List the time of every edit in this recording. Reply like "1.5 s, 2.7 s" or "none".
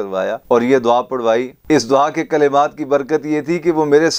none